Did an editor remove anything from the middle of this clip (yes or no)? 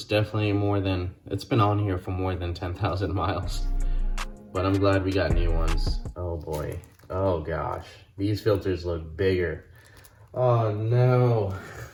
no